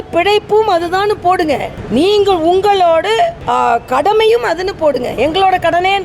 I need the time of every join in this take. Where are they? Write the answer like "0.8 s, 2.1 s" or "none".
none